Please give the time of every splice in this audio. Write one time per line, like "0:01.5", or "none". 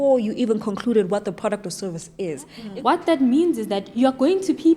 0:02.6